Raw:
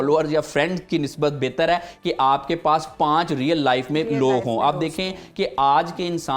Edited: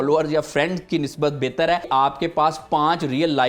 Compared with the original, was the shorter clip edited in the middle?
yes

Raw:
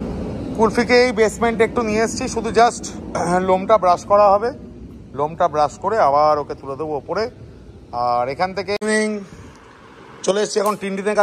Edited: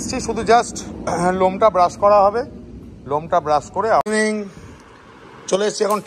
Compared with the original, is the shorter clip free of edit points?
no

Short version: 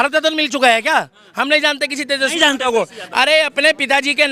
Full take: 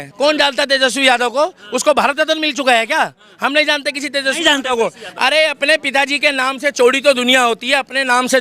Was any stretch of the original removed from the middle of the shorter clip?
no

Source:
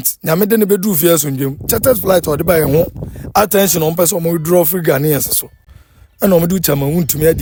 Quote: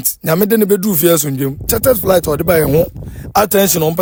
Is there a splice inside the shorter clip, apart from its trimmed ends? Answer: no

